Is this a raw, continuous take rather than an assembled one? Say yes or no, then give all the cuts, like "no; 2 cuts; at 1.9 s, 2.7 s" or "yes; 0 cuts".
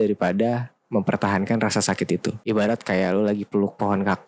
no; 1 cut; at 2.4 s